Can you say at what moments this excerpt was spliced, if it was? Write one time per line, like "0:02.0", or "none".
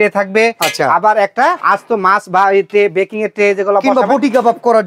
0:01.6